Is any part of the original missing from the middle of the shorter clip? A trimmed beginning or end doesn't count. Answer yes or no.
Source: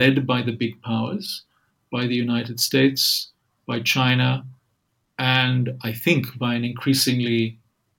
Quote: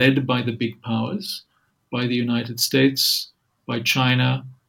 no